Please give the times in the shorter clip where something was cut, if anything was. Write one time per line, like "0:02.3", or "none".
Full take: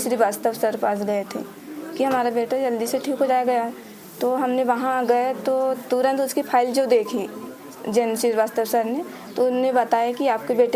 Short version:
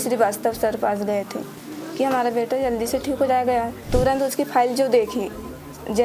0:03.8